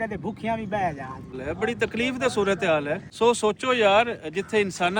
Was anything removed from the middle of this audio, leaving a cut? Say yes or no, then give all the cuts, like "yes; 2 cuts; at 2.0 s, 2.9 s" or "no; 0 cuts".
yes; 2 cuts; at 1.4 s, 3.0 s